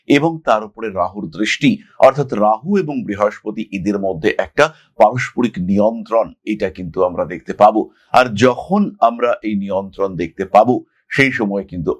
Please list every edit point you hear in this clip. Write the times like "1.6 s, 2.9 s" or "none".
none